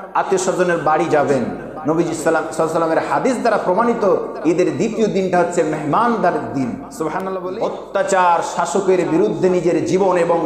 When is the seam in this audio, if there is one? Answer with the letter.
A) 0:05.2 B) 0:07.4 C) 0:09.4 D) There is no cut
B